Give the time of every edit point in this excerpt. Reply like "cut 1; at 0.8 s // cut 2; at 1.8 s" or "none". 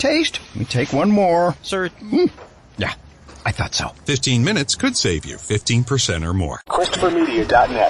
cut 1; at 6.6 s